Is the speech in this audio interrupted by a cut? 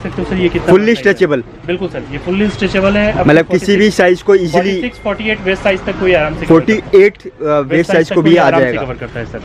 no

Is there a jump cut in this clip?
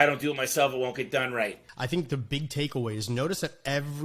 yes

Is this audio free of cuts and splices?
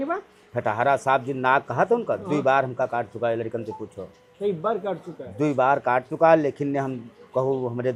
yes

